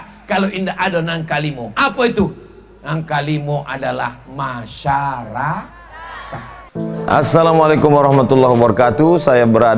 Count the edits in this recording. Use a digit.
1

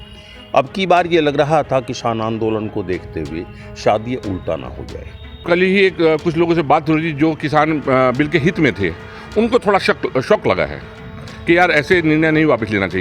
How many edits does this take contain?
1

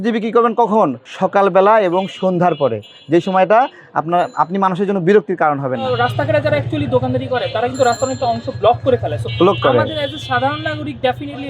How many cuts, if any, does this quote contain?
2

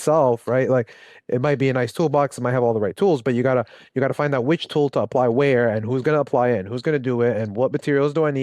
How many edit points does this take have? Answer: 0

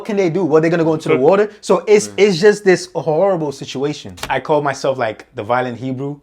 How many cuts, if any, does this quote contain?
1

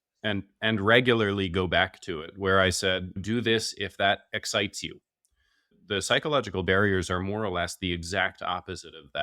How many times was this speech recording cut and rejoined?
1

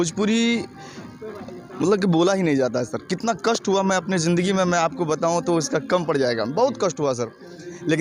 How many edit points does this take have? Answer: 0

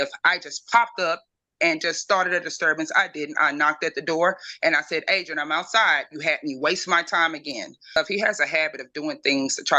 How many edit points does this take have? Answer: 1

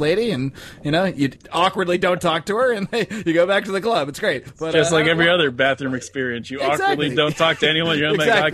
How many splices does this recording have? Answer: 2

